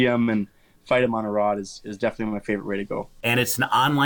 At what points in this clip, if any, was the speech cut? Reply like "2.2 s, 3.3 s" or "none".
3.1 s